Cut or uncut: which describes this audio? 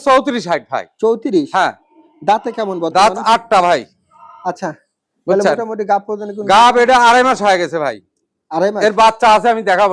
uncut